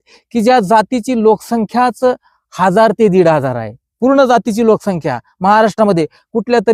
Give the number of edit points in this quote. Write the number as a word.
zero